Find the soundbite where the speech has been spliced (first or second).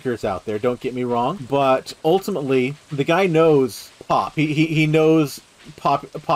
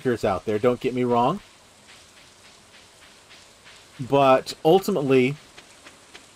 first